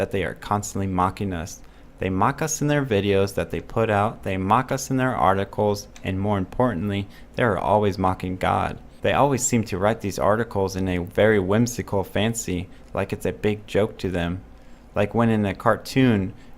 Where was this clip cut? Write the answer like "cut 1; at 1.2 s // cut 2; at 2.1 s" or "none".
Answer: cut 1; at 9.7 s

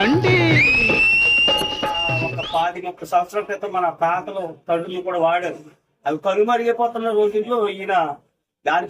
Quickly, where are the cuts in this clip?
cut 1; at 2.3 s

